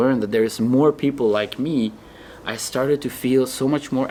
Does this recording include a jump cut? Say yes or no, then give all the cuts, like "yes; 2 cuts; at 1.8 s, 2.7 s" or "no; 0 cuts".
no; 0 cuts